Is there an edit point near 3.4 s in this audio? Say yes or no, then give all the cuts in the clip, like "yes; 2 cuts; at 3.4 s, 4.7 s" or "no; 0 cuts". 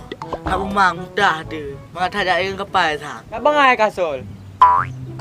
yes; 1 cut; at 3.4 s